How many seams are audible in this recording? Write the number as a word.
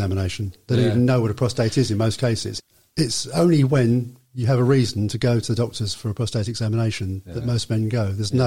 one